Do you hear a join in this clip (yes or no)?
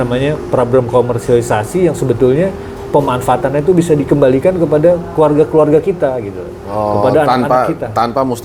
no